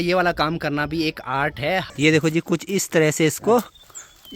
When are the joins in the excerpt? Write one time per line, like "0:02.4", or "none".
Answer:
0:01.9